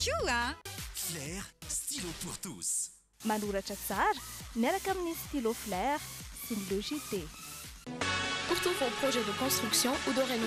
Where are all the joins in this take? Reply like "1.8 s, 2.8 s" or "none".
none

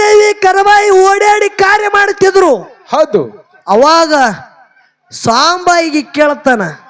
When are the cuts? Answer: none

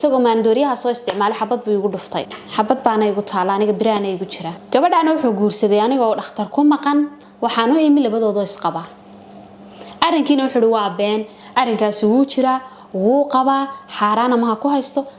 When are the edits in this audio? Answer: 2.4 s, 4.5 s

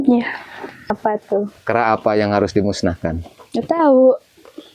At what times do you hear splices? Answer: 1.0 s

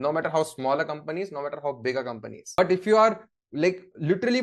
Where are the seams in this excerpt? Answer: 2.6 s

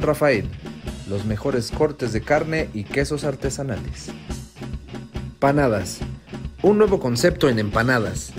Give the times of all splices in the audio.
5.4 s

